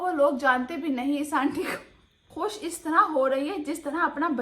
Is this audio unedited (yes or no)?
no